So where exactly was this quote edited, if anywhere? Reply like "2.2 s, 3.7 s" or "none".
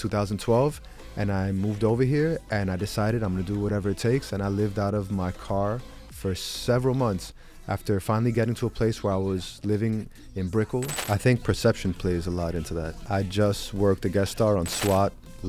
11.0 s, 13.0 s